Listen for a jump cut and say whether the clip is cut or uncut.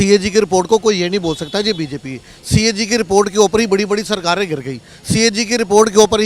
uncut